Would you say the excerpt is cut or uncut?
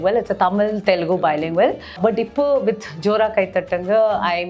cut